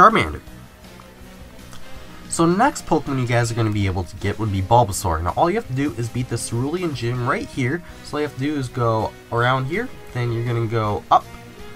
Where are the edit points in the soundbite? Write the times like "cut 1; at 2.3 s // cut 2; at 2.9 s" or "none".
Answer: cut 1; at 7.0 s